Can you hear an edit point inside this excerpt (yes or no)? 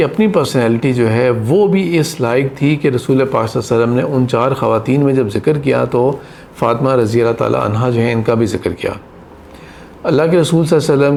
no